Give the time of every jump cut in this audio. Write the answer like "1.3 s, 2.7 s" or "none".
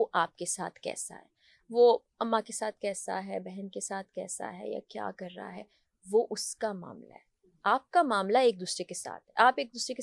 none